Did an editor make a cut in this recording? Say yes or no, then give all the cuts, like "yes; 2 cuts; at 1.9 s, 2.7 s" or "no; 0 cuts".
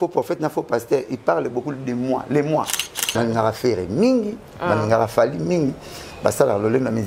yes; 1 cut; at 3.1 s